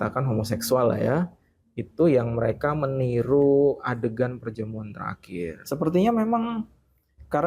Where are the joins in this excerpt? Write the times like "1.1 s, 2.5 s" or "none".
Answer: 5.6 s